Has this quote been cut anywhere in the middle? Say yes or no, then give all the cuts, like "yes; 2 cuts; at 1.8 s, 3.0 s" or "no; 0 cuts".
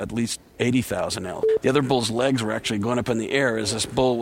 yes; 1 cut; at 1.5 s